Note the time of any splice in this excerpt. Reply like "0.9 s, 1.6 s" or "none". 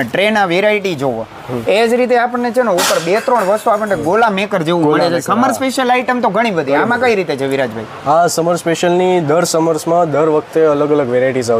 none